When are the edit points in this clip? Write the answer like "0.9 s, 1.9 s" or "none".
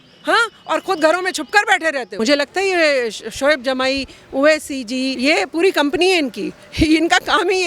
2.1 s, 5.1 s